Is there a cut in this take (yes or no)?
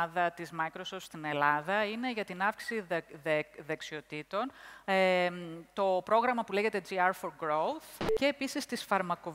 yes